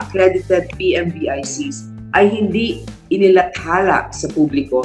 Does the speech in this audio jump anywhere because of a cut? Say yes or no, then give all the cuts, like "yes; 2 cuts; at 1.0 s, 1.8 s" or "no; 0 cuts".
no; 0 cuts